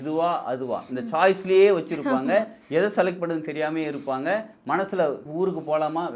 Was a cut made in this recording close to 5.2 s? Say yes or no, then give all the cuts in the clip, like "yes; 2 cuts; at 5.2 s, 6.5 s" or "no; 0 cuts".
yes; 1 cut; at 5.2 s